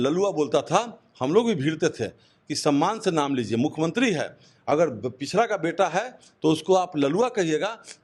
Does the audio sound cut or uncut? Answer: uncut